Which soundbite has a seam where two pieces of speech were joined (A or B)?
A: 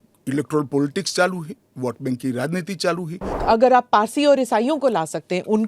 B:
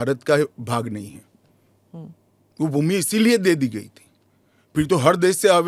A